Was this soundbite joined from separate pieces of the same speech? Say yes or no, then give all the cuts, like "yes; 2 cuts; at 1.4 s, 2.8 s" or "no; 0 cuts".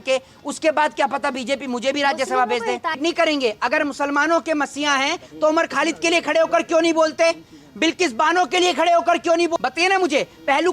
yes; 2 cuts; at 3.0 s, 9.5 s